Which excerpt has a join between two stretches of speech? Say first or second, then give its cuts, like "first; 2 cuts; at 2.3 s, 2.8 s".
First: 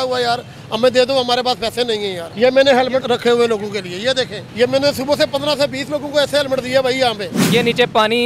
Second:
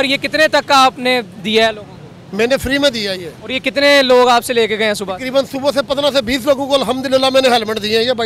first; 4 cuts; at 2.2 s, 3.0 s, 4.4 s, 7.3 s